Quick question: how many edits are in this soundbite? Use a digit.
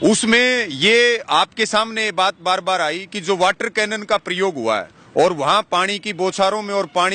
1